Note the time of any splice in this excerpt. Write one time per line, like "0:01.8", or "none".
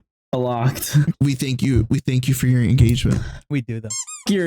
0:01.1

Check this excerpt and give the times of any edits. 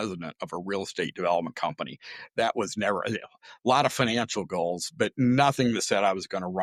none

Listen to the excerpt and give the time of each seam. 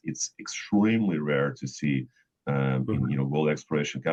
none

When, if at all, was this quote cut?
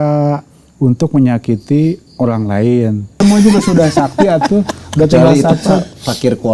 0:03.2

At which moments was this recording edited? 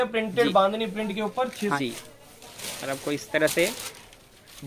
0:01.8

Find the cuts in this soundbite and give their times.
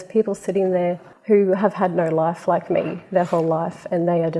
0:01.1

